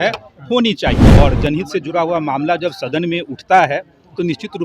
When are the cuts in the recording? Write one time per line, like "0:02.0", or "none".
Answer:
0:01.2